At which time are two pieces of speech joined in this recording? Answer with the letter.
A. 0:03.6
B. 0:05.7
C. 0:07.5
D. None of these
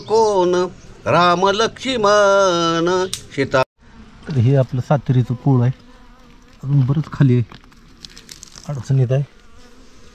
A